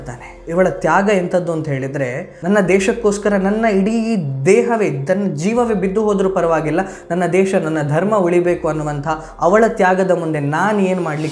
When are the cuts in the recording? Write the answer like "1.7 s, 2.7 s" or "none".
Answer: none